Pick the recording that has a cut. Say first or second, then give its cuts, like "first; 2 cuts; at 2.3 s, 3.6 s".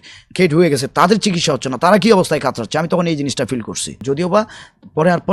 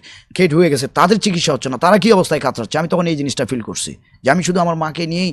first; 1 cut; at 4.0 s